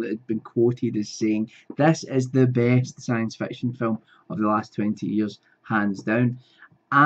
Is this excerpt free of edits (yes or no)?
no